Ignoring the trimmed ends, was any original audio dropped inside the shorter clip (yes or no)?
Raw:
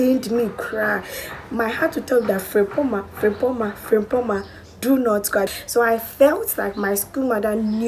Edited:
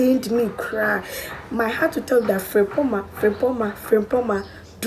no